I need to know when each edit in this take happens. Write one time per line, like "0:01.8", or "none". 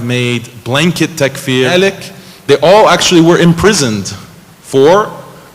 0:01.7